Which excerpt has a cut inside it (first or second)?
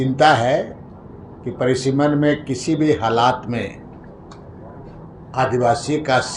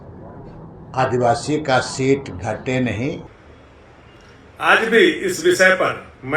second